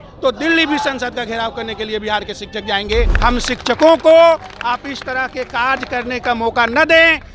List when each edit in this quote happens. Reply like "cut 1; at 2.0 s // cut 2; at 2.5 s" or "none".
cut 1; at 3.1 s